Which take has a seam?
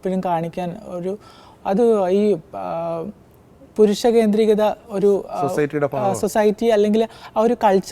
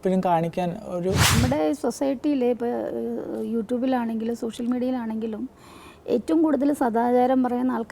second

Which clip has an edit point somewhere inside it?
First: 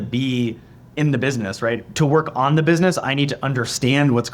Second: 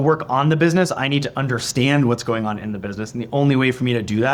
first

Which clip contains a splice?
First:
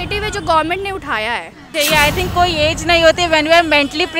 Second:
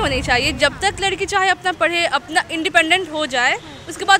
first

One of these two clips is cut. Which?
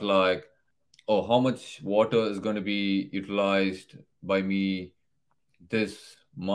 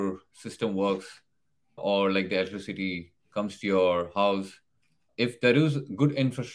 second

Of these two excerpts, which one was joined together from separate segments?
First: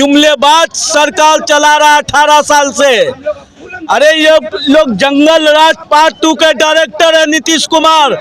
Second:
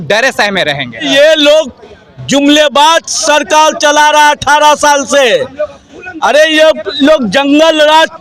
second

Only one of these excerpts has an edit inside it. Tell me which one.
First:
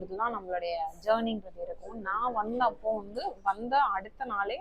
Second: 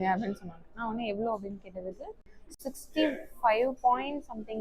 second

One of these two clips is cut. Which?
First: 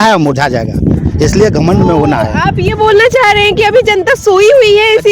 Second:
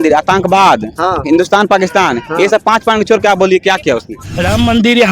second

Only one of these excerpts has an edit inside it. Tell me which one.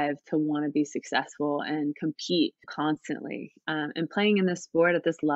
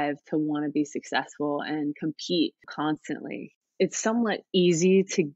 second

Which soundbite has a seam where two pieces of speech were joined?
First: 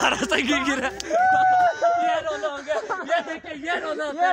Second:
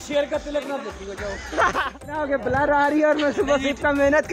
second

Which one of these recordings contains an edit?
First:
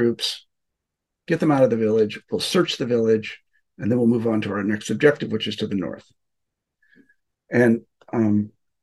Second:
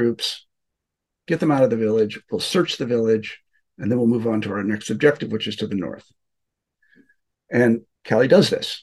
second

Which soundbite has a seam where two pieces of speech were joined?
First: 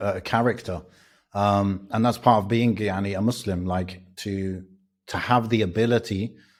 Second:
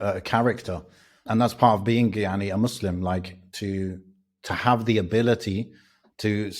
second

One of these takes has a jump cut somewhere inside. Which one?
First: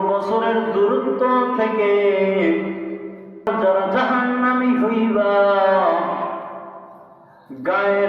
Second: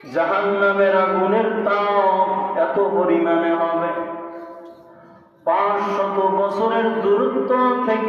first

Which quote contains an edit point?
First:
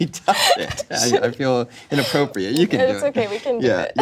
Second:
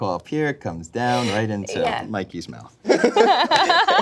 second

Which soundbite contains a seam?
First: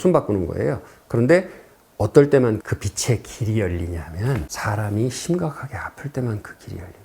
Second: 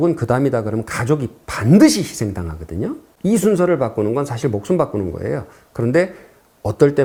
first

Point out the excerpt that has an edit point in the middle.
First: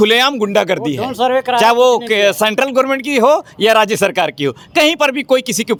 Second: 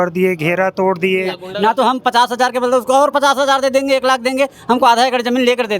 second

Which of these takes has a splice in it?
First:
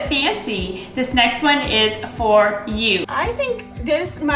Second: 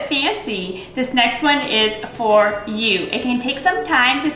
first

